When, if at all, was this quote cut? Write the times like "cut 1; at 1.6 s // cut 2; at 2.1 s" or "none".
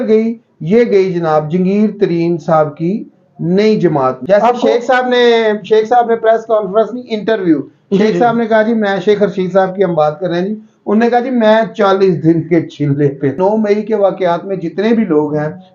cut 1; at 4.2 s // cut 2; at 13.4 s